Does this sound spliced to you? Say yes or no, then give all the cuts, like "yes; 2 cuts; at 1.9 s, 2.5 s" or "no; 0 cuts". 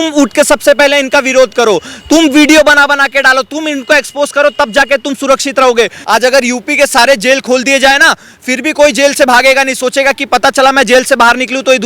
yes; 1 cut; at 6.0 s